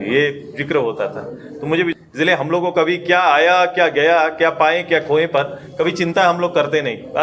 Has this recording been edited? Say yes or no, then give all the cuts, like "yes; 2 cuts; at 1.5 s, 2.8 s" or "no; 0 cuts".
yes; 1 cut; at 1.9 s